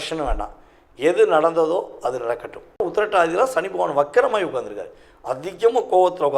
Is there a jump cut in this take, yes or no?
yes